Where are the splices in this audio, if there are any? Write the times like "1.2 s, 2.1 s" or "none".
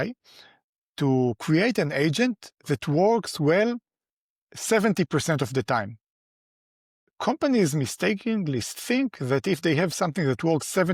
none